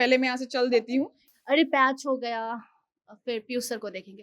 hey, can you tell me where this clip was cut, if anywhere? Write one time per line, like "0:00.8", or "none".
0:01.2